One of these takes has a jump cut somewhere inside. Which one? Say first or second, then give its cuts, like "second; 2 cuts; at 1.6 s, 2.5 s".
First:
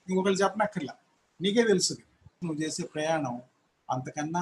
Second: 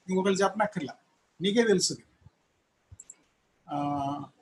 first; 1 cut; at 2.4 s